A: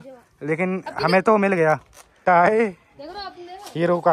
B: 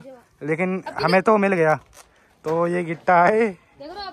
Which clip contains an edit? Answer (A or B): A